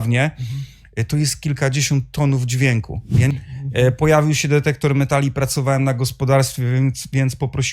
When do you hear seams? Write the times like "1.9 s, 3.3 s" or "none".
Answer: 3.3 s

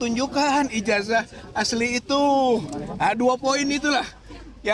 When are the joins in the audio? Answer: none

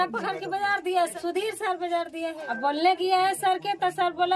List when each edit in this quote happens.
1.1 s, 2.4 s

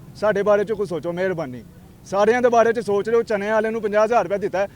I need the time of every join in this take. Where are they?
none

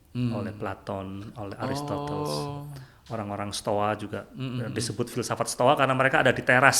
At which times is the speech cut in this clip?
none

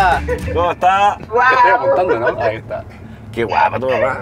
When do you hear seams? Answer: none

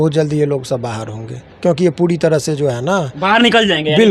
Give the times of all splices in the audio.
none

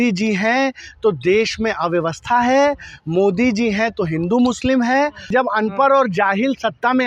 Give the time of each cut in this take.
5.3 s

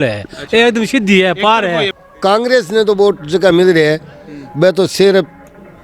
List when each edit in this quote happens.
2.0 s

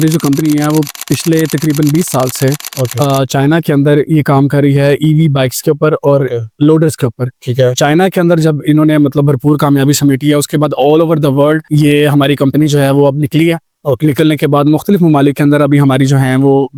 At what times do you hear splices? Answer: none

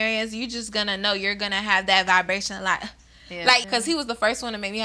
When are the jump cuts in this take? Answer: 3.7 s

